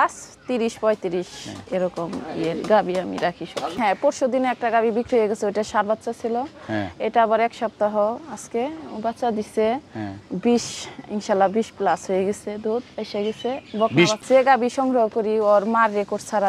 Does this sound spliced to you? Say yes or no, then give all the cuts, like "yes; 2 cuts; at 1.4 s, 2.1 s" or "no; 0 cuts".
yes; 2 cuts; at 3.7 s, 14.2 s